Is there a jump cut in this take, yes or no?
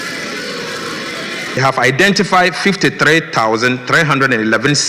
yes